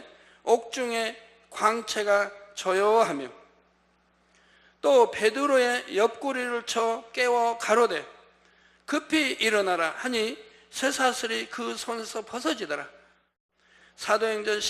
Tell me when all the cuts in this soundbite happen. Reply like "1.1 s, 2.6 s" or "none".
13.4 s